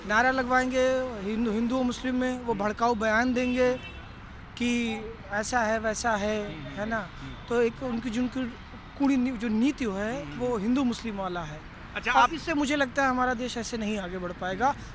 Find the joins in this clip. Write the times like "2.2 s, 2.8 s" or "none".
none

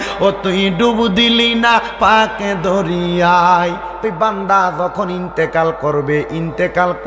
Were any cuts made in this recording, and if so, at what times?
4.0 s

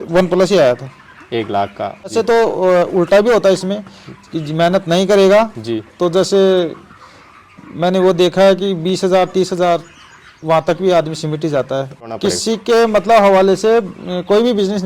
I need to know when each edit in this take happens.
2.1 s, 12.1 s

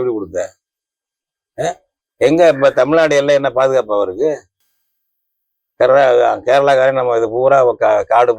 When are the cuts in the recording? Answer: none

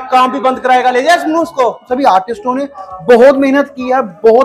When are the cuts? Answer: 1.9 s

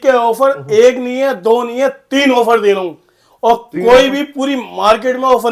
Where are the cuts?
none

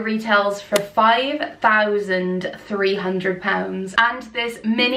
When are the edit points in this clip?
none

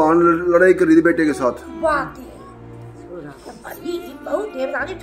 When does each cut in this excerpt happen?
none

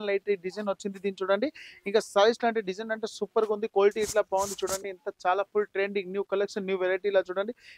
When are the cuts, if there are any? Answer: none

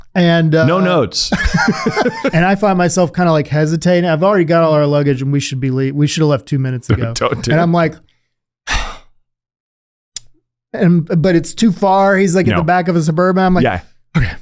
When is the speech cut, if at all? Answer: 2.3 s

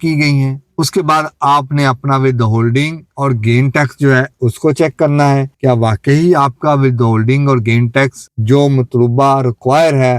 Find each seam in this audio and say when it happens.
none

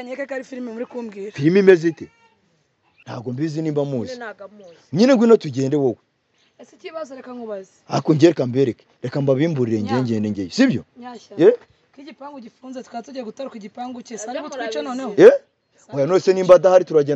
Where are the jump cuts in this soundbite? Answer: 3.0 s

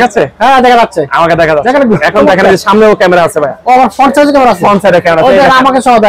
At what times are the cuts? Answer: none

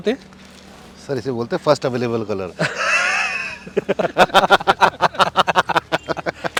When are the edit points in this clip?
none

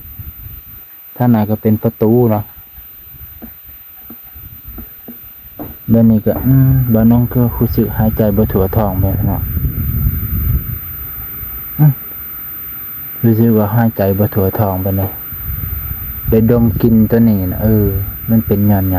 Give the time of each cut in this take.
none

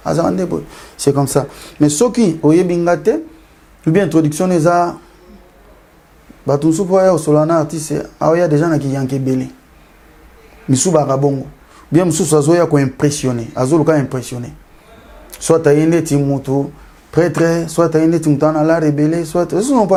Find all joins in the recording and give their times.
none

